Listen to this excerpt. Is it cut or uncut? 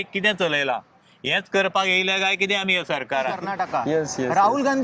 cut